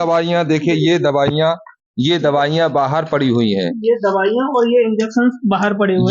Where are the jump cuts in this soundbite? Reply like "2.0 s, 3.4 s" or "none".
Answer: none